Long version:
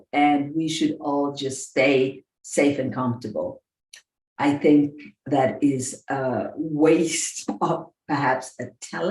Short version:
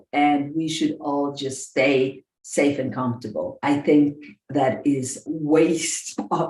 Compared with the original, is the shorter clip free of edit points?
no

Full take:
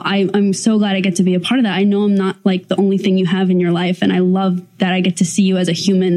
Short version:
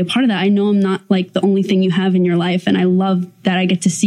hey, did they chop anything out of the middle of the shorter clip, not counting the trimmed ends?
no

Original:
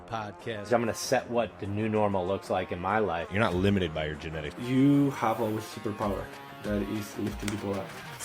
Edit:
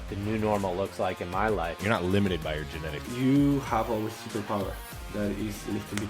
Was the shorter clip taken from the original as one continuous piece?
yes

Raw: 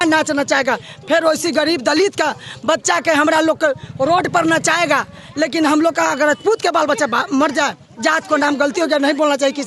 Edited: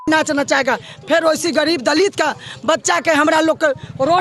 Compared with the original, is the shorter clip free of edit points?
yes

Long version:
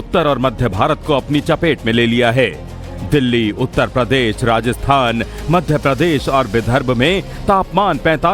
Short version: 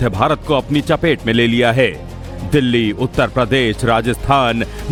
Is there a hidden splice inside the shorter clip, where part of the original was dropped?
no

